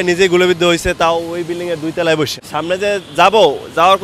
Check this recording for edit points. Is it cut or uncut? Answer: cut